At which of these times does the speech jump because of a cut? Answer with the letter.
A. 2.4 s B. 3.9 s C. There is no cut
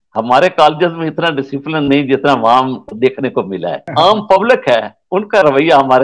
B